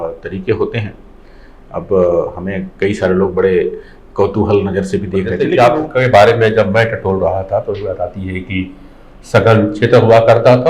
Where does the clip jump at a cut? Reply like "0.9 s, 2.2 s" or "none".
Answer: 5.4 s